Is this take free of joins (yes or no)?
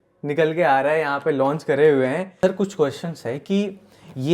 no